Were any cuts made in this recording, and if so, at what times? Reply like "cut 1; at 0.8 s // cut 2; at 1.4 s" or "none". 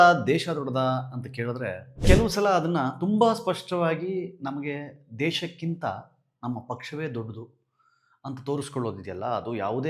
cut 1; at 2.0 s